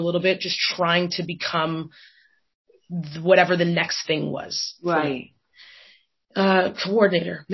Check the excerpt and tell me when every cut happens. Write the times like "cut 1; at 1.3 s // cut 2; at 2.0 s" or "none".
none